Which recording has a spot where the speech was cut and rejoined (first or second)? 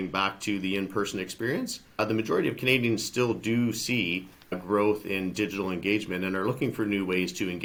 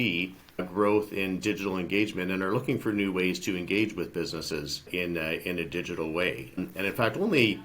second